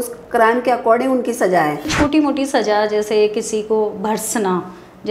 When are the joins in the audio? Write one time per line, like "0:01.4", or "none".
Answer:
0:01.9